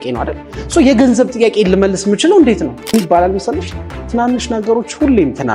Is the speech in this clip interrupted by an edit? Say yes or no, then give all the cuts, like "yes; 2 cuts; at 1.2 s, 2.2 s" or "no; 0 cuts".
yes; 1 cut; at 2.9 s